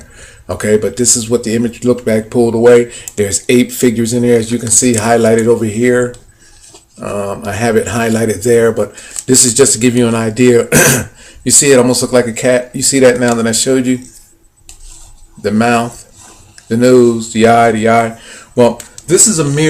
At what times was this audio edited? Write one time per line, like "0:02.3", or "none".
0:07.1